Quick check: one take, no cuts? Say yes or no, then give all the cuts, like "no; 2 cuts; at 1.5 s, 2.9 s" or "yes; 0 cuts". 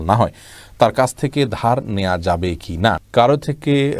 no; 1 cut; at 3.0 s